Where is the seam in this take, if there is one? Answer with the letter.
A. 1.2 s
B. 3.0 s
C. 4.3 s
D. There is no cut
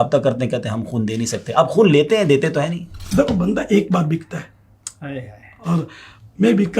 B